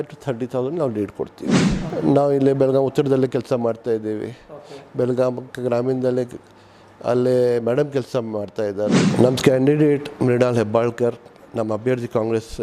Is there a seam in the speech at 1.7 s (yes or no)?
yes